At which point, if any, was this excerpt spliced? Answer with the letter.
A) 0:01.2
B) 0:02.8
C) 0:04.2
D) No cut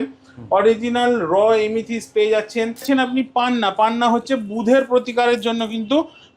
B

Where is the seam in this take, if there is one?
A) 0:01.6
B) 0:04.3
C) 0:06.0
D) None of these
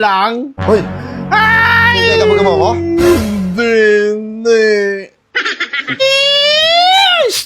C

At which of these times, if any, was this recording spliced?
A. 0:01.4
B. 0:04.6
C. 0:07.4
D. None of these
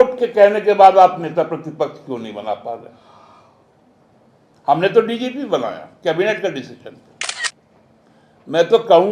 C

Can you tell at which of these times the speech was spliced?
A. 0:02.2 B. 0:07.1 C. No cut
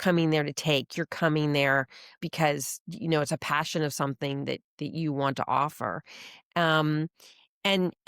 A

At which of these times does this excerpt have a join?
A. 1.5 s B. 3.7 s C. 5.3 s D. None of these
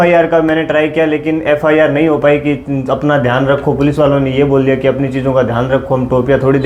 D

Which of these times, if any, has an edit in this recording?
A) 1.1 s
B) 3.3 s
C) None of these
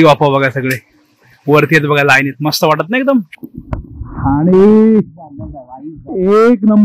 B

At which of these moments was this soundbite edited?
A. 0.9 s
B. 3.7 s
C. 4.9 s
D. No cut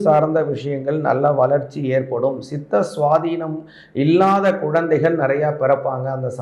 D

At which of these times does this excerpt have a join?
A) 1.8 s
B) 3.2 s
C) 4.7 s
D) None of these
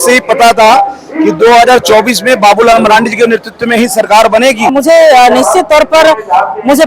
C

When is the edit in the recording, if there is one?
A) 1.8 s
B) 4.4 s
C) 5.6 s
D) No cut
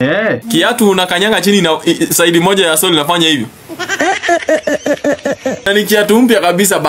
C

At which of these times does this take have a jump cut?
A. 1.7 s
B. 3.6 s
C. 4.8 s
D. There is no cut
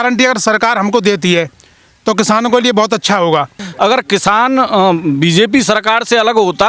B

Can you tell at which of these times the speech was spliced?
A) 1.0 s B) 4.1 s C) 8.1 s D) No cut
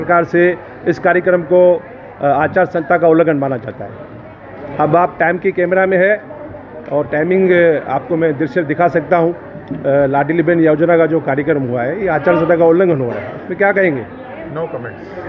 D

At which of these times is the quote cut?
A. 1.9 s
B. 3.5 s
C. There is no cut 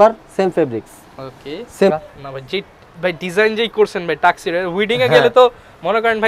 A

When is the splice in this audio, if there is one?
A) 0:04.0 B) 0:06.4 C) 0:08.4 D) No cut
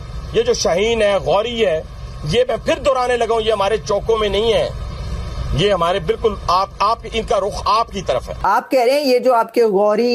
C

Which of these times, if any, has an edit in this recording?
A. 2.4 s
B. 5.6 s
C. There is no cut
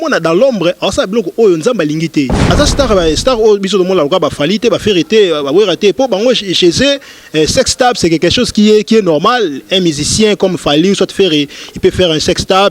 A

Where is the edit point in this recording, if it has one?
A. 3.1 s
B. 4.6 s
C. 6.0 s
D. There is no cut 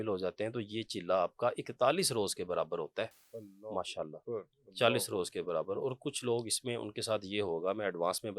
D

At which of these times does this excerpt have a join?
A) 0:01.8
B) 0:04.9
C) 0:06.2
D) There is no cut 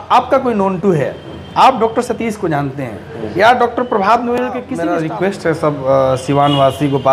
B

